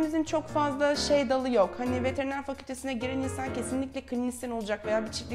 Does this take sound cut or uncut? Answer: uncut